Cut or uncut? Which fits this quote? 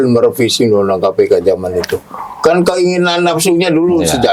uncut